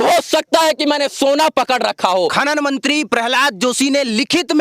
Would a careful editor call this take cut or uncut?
cut